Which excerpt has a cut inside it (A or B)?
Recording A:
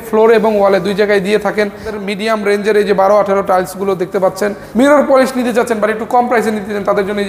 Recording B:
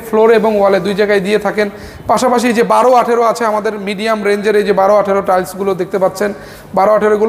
A